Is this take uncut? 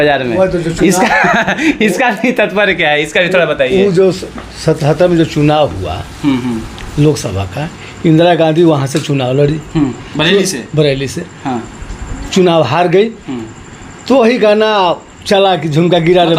yes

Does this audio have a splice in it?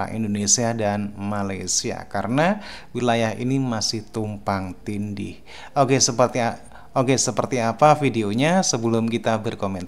no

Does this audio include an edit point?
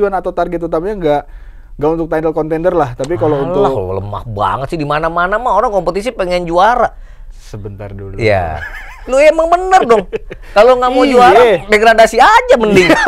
no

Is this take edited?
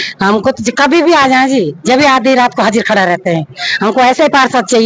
no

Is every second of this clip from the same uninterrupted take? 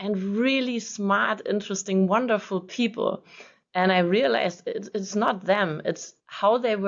yes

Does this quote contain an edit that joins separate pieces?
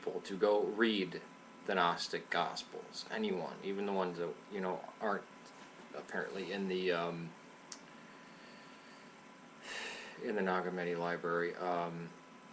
no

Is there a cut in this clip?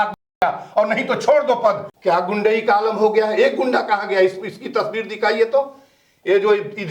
yes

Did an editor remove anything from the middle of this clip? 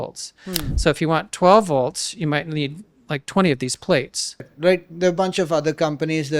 yes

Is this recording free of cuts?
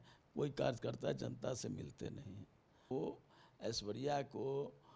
no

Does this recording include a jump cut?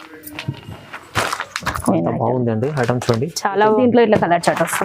yes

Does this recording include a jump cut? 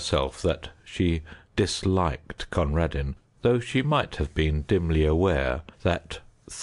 yes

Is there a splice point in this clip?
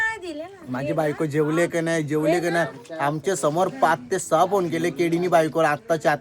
no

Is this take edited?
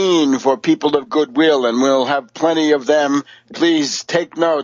no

